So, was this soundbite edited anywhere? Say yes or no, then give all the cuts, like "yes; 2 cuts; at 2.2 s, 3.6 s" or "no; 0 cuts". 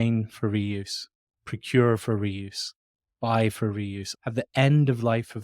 yes; 2 cuts; at 1.4 s, 4.1 s